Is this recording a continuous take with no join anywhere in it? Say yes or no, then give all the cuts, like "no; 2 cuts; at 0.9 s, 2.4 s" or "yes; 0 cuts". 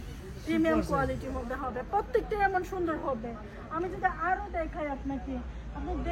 yes; 0 cuts